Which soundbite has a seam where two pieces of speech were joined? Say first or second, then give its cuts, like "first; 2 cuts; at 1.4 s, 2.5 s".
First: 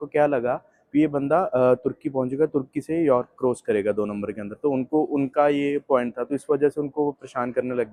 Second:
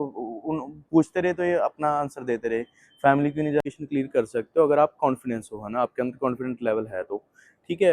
second; 1 cut; at 3.6 s